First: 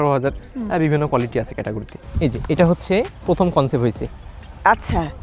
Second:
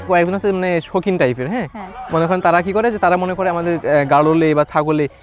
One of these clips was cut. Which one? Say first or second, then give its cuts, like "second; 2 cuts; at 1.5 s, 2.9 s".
first; 1 cut; at 1.9 s